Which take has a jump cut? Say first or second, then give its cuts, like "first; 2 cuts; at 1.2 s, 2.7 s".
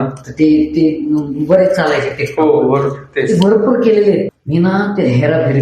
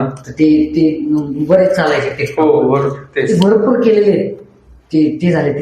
first; 1 cut; at 4.4 s